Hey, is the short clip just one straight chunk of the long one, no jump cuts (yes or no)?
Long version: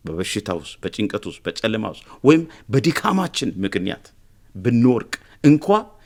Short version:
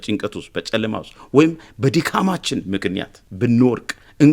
no